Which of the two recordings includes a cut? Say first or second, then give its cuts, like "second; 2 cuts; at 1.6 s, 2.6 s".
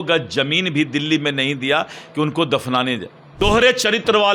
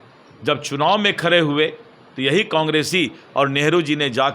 first; 1 cut; at 3.2 s